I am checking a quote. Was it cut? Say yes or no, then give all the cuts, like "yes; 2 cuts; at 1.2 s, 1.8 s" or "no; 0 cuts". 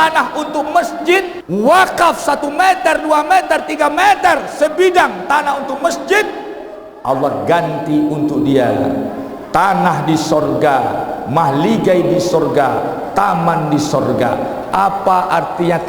yes; 1 cut; at 1.4 s